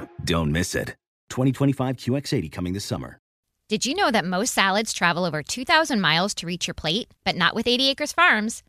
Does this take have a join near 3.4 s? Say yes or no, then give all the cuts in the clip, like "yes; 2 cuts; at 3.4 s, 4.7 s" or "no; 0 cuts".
yes; 1 cut; at 3.4 s